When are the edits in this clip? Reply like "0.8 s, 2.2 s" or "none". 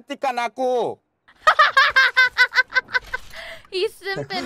none